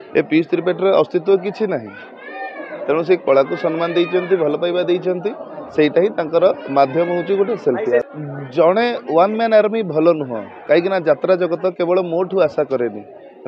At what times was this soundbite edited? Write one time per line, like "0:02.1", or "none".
0:08.0

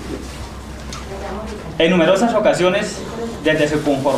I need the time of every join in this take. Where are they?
none

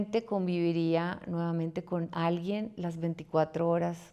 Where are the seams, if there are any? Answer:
none

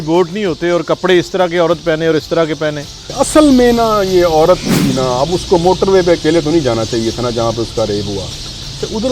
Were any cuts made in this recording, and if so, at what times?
0:03.0

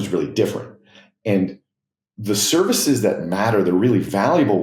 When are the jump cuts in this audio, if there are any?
none

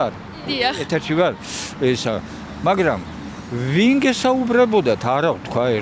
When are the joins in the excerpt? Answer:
none

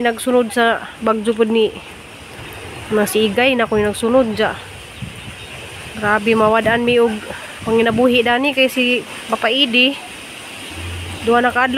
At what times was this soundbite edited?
none

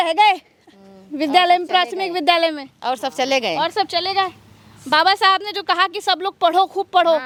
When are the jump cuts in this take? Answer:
none

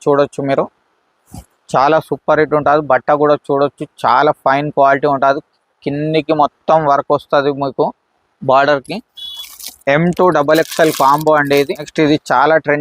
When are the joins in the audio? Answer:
0:11.9

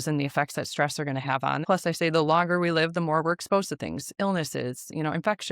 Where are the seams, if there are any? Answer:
0:01.6

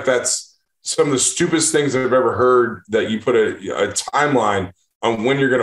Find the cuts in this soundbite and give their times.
none

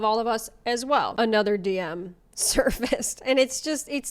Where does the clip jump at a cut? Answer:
0:01.1

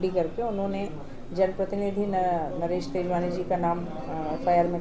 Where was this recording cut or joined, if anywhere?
none

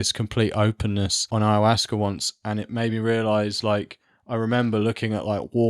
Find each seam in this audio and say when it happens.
0:01.2

